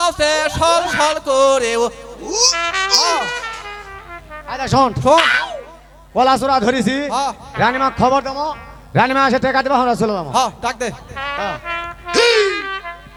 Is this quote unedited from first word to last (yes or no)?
yes